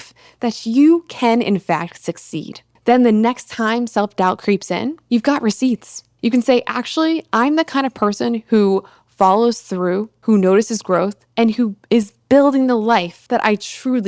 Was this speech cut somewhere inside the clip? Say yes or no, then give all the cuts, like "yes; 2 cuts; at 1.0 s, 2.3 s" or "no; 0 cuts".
yes; 2 cuts; at 11.8 s, 13.2 s